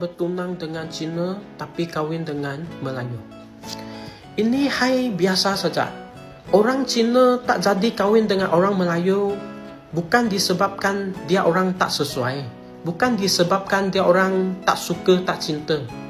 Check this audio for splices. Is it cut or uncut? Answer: uncut